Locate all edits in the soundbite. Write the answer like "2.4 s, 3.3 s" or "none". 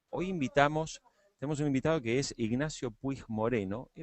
2.3 s